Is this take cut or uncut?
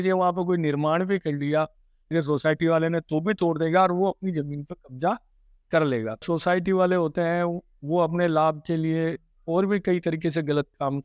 cut